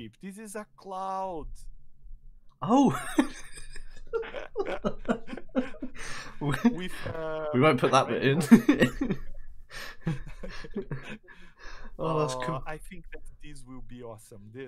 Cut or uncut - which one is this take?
uncut